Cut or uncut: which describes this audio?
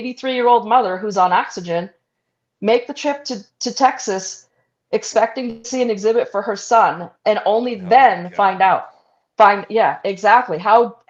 uncut